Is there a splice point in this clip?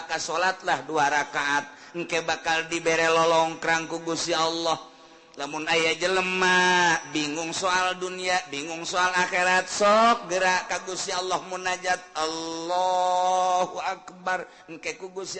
no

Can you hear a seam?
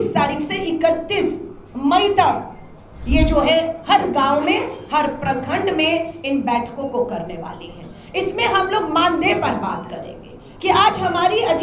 no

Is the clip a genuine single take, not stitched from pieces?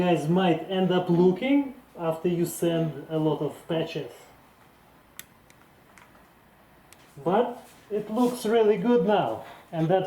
no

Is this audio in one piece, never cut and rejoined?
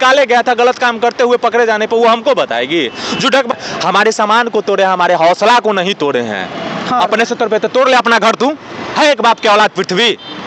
no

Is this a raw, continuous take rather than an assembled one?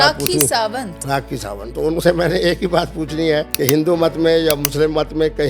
no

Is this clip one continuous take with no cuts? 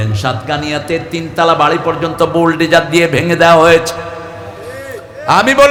yes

